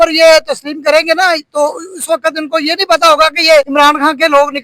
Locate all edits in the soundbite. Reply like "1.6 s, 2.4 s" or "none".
3.7 s